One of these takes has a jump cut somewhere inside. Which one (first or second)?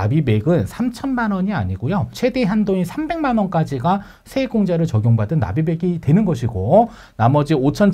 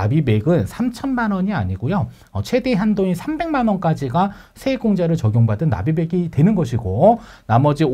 first